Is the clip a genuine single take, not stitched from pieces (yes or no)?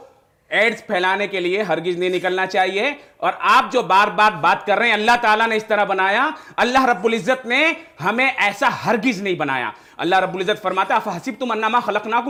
yes